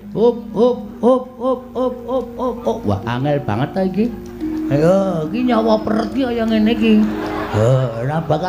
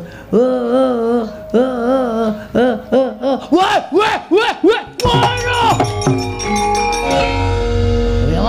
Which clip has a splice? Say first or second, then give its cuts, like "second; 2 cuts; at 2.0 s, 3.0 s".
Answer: second; 1 cut; at 7.1 s